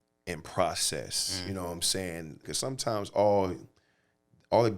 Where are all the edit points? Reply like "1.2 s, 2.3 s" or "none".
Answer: 2.5 s